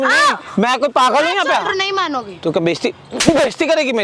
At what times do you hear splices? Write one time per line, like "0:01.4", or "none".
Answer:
0:01.7